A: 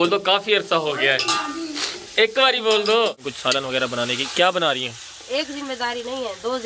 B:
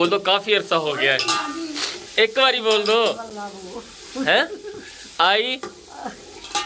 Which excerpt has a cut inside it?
A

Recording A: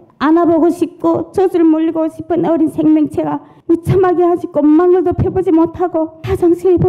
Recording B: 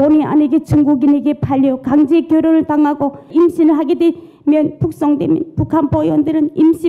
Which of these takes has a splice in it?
B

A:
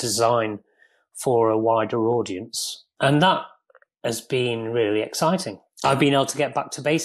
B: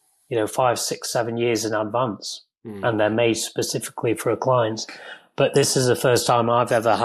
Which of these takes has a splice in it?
A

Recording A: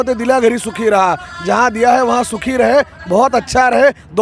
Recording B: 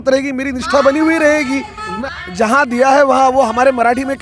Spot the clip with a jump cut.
B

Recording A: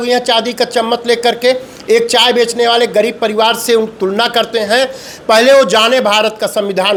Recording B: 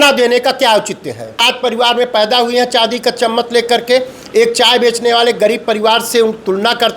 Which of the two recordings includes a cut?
B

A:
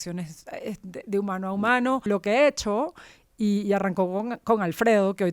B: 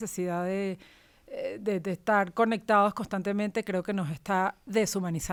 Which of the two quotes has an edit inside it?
A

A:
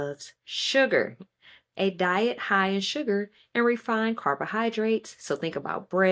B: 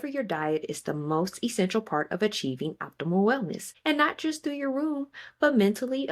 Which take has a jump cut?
B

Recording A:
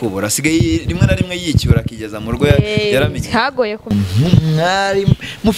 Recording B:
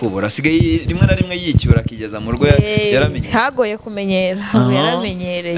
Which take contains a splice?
A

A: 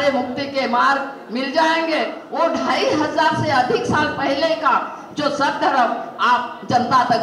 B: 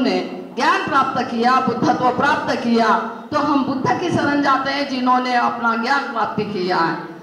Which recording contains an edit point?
A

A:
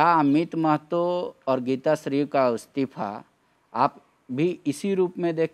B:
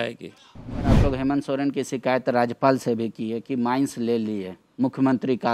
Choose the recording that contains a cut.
B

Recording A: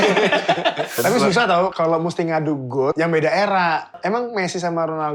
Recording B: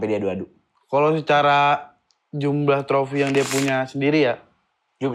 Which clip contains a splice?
A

